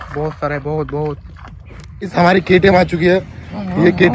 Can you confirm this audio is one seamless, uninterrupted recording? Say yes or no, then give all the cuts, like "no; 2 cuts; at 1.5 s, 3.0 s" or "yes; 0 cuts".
no; 1 cut; at 1.9 s